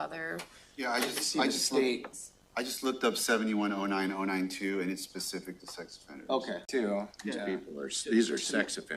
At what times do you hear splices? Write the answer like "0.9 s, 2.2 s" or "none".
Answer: 6.6 s